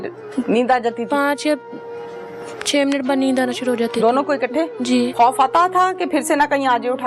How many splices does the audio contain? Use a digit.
1